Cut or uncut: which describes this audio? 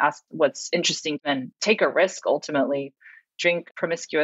cut